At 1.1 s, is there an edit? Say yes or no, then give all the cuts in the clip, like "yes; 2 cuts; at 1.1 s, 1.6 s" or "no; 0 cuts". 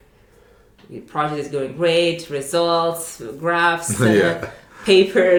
no; 0 cuts